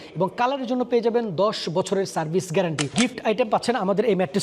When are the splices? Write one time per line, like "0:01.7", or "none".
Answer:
0:02.9